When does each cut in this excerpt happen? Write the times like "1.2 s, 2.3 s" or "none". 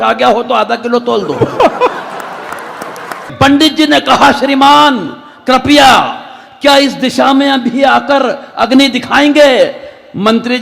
3.3 s

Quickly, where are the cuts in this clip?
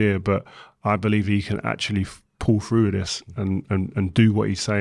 none

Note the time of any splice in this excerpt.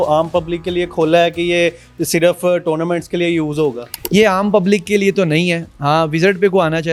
none

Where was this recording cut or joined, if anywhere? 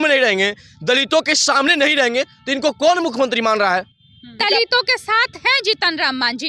4.4 s

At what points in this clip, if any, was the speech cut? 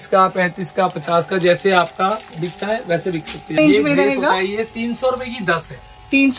3.6 s

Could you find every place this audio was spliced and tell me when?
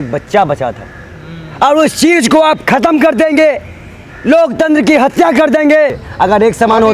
6.0 s

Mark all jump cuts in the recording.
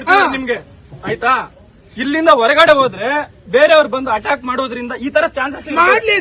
none

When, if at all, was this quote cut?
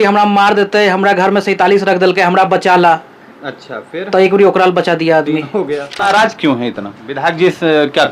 6.0 s

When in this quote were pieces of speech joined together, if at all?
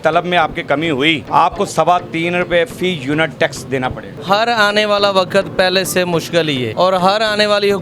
1.2 s, 4.1 s, 6.7 s

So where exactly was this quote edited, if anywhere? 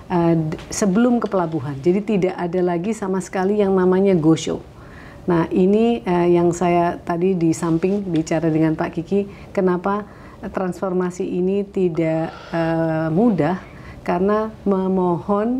none

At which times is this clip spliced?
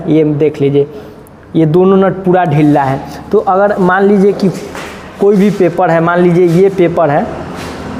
none

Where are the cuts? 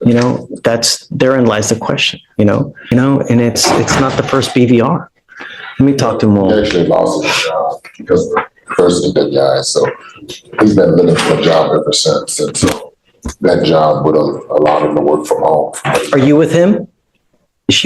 2.8 s

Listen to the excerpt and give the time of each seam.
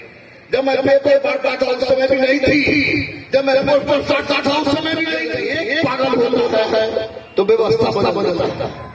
5.4 s

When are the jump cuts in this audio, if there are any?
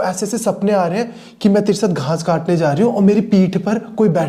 none

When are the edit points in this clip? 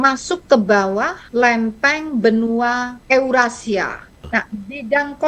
1.2 s, 2.9 s, 4.2 s

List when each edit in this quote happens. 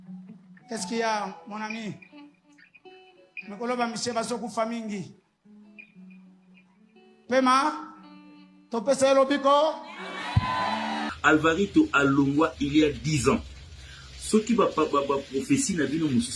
11.1 s

